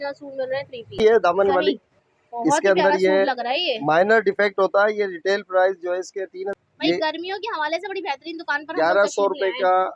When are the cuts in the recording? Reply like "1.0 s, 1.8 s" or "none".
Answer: 1.0 s, 6.5 s